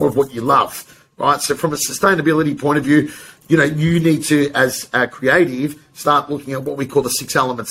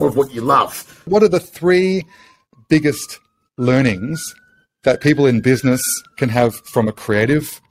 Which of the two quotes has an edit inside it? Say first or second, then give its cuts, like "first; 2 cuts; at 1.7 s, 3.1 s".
second; 1 cut; at 1.1 s